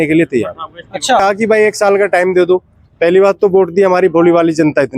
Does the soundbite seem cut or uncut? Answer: cut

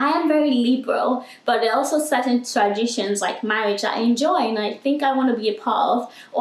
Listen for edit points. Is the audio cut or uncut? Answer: uncut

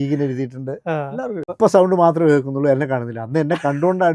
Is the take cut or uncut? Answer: cut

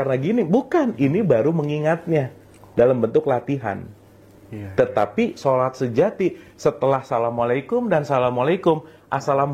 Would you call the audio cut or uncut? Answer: uncut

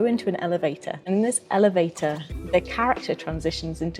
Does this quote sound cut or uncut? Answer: cut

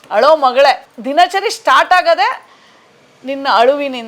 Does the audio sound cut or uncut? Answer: cut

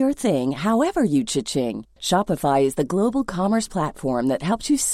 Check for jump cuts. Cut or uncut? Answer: uncut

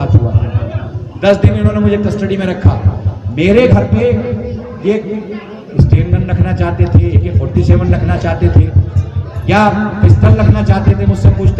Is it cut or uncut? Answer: uncut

